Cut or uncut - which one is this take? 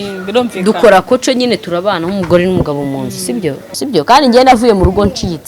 cut